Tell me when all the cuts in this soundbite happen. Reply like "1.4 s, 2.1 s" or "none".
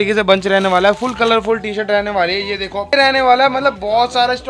2.9 s